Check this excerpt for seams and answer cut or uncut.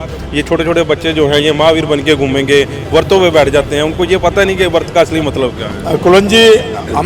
cut